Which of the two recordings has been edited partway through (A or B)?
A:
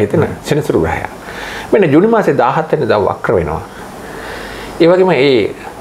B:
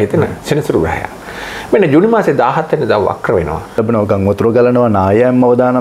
B